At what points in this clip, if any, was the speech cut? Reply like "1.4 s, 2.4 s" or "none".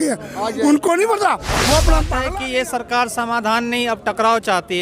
2.1 s